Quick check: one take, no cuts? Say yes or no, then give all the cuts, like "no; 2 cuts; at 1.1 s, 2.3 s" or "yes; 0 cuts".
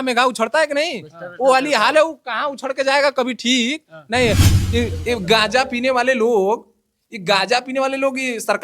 no; 1 cut; at 4.5 s